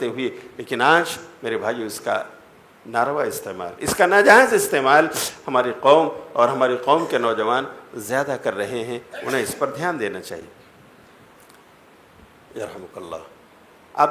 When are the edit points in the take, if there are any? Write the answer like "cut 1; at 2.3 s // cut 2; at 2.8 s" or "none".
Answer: none